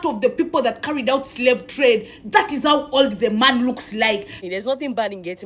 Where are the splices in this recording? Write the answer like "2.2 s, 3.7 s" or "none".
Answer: 4.3 s